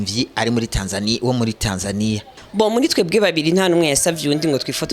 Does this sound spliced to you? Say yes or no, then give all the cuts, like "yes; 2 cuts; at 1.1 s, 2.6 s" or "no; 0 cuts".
yes; 1 cut; at 2.3 s